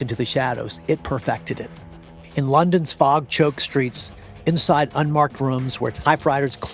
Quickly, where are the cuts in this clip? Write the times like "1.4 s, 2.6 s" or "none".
none